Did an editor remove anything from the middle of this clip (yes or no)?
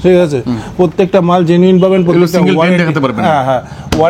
no